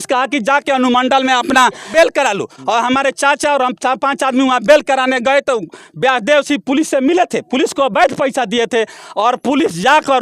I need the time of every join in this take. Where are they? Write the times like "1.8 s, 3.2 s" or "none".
1.8 s

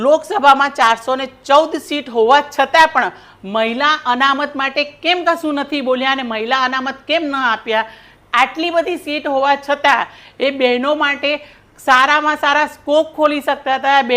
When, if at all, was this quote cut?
none

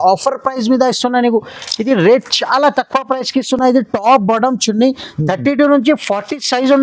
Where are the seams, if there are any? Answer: none

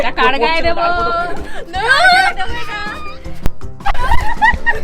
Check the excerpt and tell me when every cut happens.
3.5 s

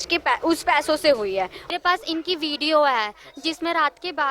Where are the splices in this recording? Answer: 1.6 s

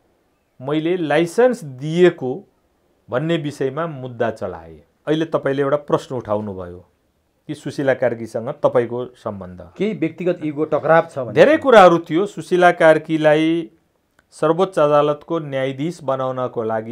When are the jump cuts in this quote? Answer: 5.0 s

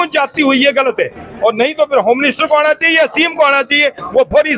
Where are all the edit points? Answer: none

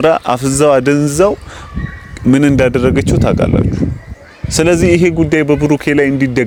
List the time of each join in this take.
none

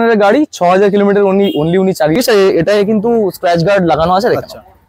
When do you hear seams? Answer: 2.1 s

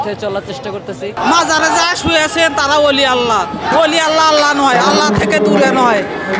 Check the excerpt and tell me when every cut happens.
1.1 s

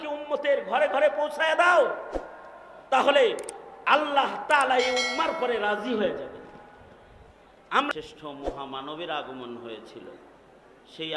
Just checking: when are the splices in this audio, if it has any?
7.9 s

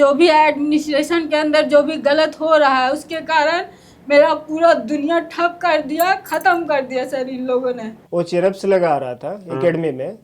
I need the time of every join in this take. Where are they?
7.9 s

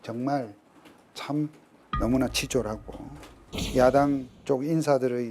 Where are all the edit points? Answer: 1.7 s, 3.3 s, 4.3 s

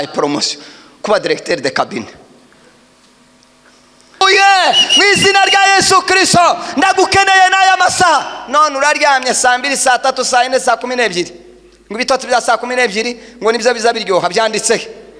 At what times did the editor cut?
4.2 s

